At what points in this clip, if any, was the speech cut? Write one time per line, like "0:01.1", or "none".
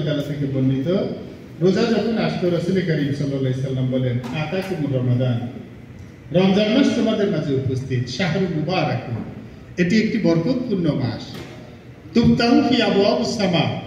none